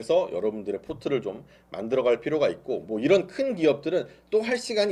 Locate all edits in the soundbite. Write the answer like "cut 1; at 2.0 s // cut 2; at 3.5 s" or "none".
none